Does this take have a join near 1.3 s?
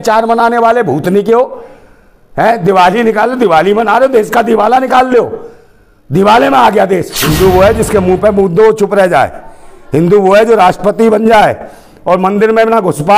no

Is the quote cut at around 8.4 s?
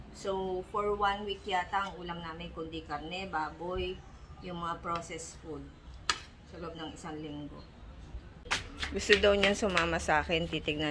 yes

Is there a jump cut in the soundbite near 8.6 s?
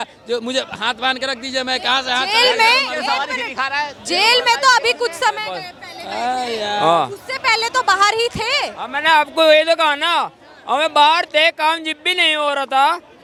no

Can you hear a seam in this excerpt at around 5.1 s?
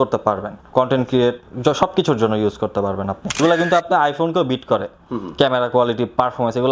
no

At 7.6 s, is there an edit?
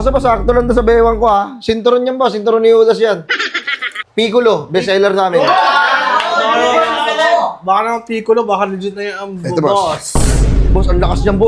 no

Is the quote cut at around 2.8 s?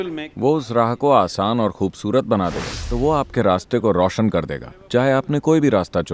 yes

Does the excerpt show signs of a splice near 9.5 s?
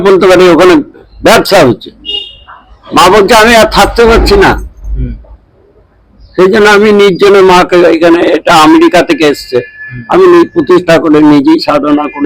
no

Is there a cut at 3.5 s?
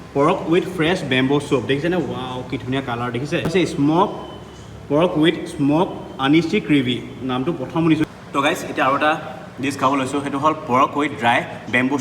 yes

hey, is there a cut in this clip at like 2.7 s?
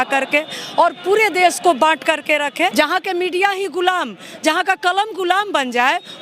yes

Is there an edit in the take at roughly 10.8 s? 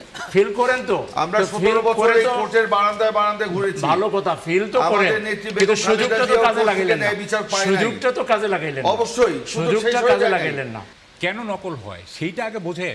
yes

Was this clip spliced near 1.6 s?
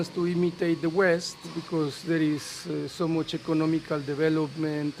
yes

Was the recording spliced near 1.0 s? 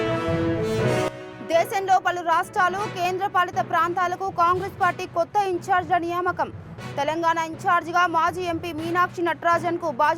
yes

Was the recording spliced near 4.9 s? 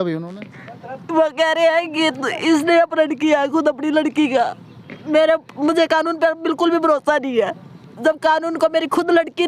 yes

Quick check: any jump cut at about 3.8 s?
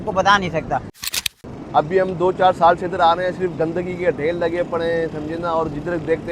no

